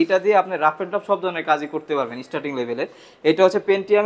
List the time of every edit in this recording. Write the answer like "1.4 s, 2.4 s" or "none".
none